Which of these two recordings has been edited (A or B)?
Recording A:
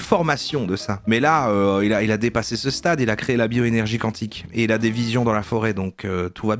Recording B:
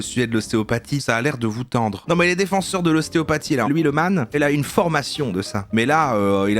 B